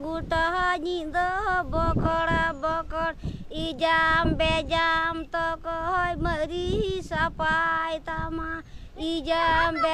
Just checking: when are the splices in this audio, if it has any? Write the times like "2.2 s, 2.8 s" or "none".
none